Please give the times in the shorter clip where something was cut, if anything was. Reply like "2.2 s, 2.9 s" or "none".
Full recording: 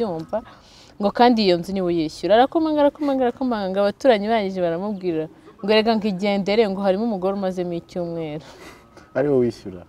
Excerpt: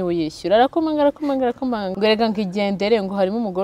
1.9 s